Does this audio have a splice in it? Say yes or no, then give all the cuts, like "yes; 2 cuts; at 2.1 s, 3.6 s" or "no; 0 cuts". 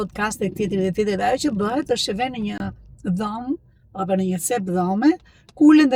no; 0 cuts